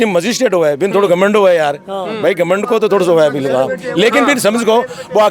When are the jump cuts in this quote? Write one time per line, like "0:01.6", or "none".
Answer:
none